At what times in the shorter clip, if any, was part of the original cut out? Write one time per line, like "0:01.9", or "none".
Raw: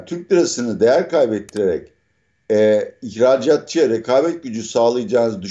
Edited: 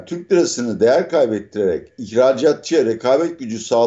0:02.0